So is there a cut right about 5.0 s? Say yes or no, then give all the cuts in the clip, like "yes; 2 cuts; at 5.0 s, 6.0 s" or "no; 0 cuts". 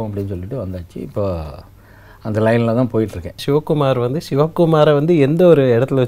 no; 1 cut; at 3.4 s